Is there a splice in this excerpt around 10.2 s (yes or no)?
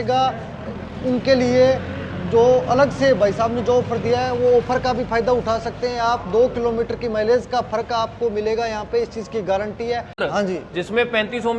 yes